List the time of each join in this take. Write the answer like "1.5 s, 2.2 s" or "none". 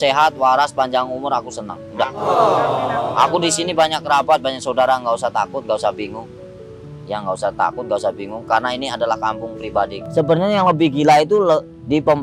10.0 s